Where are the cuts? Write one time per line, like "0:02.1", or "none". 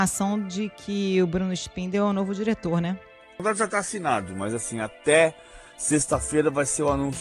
0:03.4